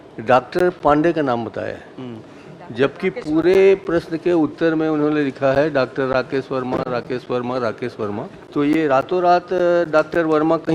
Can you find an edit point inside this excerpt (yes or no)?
yes